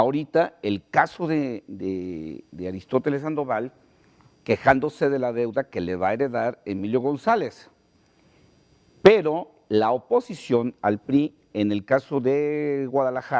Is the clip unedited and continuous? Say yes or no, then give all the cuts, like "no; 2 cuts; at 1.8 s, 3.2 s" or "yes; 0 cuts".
yes; 0 cuts